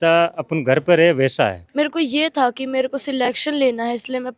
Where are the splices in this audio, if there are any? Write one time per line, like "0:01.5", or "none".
0:01.6